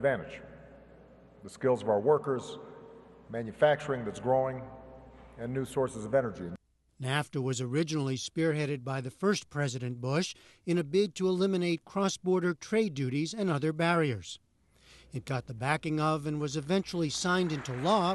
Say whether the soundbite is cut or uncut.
uncut